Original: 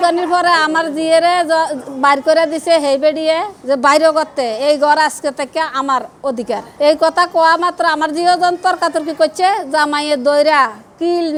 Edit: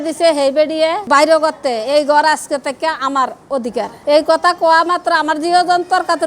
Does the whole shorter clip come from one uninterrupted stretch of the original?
no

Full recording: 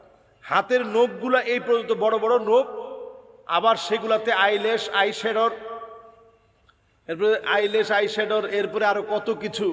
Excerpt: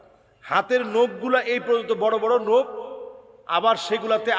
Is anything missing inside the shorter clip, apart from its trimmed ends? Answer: no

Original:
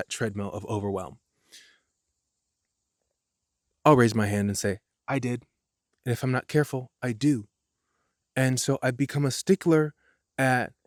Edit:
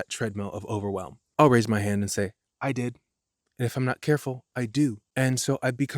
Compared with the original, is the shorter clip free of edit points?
no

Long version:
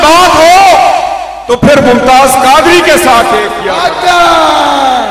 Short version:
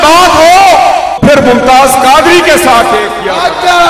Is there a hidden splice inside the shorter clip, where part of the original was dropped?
yes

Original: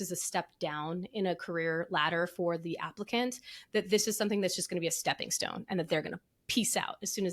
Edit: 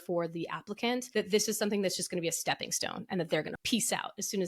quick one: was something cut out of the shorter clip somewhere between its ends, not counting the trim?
yes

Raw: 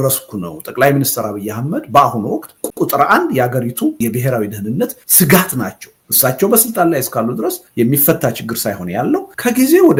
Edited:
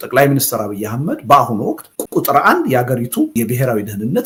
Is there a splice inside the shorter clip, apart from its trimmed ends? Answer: no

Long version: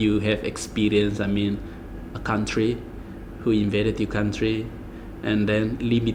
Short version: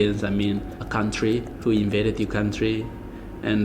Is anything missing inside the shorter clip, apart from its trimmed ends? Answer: yes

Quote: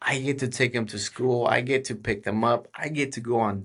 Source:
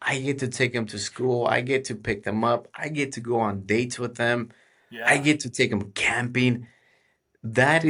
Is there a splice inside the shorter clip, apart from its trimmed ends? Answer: no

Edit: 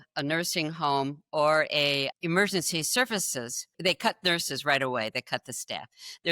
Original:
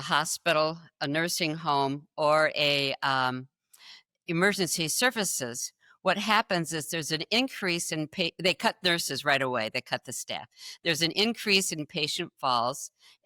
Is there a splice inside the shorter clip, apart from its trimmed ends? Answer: yes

